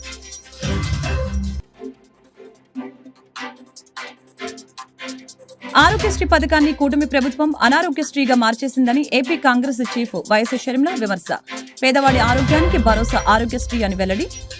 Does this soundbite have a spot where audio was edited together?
no; 0 cuts

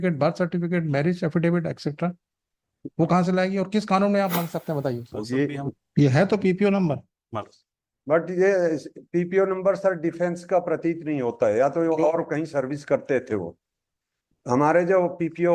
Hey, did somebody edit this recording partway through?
yes; 1 cut; at 5.7 s

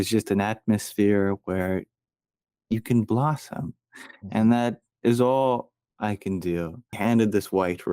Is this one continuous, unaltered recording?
no; 1 cut; at 6.9 s

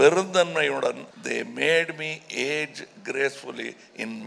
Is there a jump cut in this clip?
yes; 1 cut; at 1.1 s

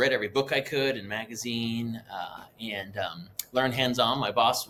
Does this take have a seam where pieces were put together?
no; 0 cuts

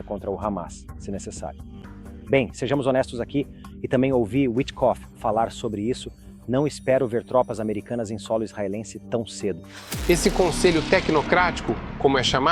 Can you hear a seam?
yes; 1 cut; at 9.9 s

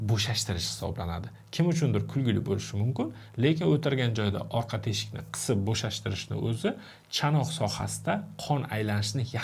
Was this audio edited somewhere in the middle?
no; 0 cuts

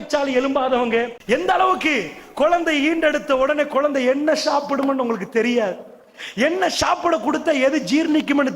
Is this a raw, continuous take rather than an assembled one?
no; 1 cut; at 1.2 s

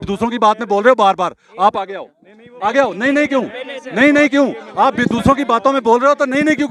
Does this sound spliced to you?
no; 0 cuts

